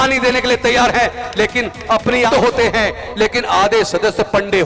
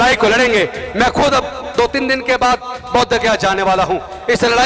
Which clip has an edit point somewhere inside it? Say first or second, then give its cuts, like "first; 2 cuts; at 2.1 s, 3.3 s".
first; 1 cut; at 2.3 s